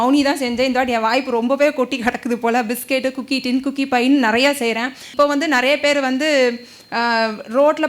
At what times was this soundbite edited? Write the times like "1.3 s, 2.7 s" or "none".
5.1 s